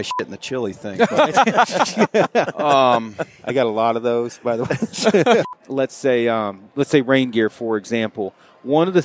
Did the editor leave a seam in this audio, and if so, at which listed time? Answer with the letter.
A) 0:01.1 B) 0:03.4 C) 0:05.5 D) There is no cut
C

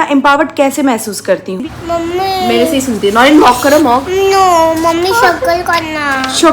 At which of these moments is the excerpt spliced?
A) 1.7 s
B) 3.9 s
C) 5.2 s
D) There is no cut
A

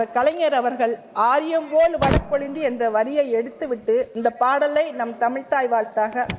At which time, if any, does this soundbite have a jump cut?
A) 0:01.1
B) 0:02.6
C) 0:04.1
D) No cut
C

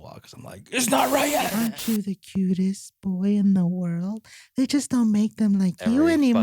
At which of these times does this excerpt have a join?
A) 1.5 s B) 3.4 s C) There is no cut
A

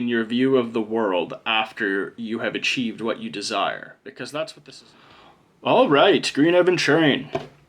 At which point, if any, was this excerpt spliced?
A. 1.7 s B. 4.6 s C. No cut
B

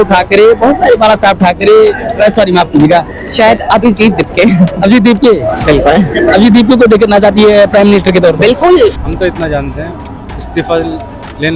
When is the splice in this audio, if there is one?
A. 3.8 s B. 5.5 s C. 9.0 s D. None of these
C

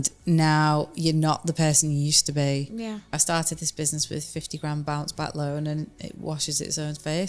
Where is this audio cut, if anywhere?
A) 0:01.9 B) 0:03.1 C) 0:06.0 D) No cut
B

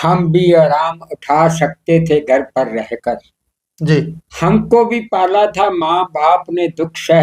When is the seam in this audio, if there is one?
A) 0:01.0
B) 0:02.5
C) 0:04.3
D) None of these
D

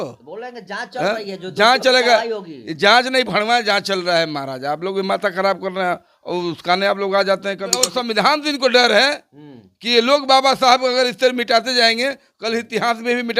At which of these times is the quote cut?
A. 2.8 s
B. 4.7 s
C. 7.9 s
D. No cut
C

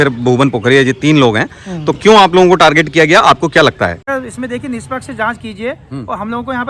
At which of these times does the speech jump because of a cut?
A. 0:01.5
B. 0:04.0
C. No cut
B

